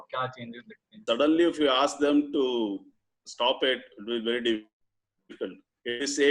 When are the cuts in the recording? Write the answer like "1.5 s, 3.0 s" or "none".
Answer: 1.0 s